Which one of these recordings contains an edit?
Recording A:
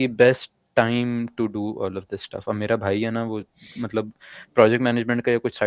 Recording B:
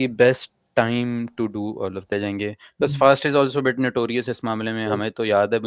B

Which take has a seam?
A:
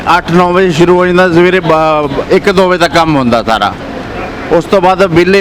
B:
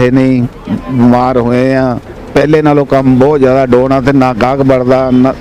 B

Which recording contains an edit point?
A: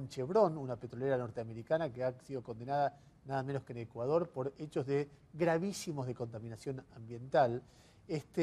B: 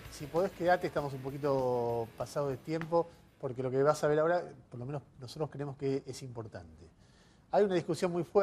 A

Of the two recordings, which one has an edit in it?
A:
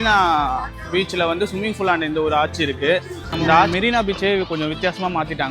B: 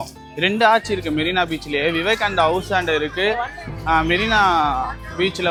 A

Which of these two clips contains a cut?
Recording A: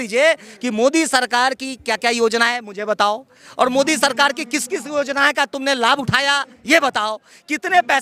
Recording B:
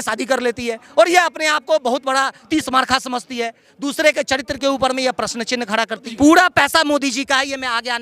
B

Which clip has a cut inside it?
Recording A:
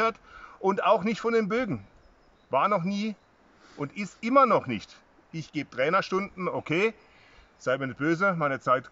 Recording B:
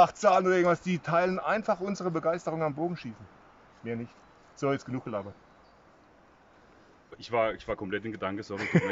B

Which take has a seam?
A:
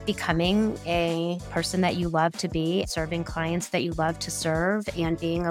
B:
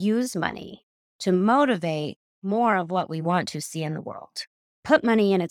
A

